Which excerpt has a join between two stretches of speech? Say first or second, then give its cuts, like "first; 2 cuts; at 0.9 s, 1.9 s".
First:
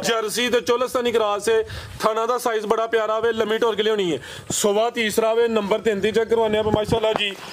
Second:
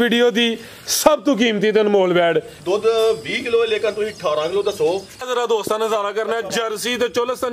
second; 2 cuts; at 2.5 s, 5.2 s